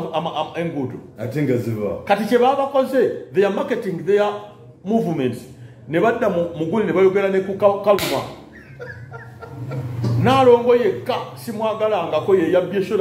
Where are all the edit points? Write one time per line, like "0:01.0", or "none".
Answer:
none